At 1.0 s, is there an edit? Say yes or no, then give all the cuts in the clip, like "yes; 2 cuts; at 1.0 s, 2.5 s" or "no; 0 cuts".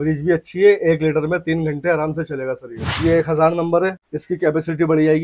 no; 2 cuts; at 2.9 s, 4.0 s